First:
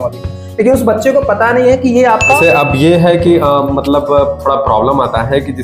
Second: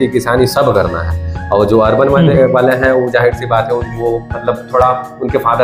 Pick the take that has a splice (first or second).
first